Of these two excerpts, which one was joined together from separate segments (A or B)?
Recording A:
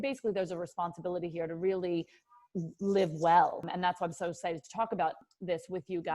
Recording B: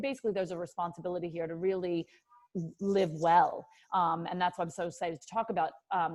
A